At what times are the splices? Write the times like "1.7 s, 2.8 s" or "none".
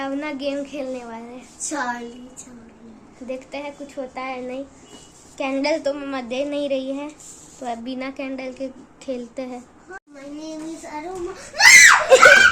none